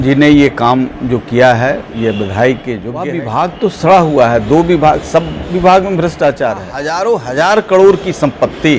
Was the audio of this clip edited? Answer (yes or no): yes